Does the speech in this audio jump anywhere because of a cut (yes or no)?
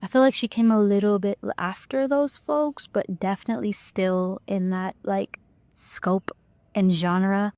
no